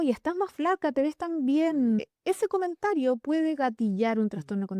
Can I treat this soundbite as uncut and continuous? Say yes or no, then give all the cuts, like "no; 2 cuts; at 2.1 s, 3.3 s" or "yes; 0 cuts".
no; 1 cut; at 2.1 s